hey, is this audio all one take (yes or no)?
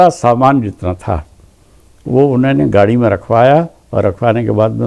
yes